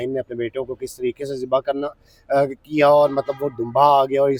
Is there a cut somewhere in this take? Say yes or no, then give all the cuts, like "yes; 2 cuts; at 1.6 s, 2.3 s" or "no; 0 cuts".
no; 0 cuts